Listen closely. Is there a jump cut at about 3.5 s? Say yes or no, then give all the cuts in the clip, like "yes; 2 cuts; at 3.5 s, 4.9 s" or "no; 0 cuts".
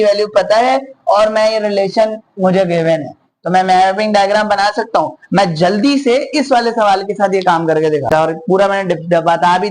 no; 1 cut; at 8.0 s